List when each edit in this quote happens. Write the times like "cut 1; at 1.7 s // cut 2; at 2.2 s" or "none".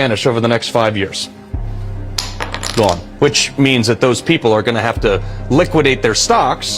cut 1; at 4.9 s

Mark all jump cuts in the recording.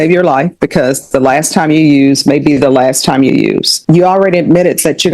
cut 1; at 3.7 s

